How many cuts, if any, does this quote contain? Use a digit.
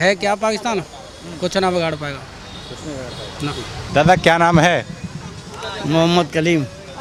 0